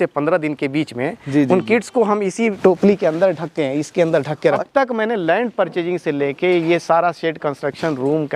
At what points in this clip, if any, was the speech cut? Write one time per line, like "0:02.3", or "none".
0:02.6
0:04.6